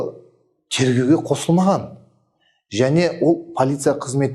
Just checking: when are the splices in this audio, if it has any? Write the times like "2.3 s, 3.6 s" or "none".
none